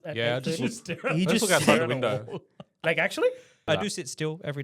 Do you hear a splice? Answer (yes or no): yes